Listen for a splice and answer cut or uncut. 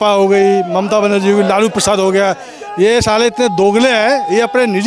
uncut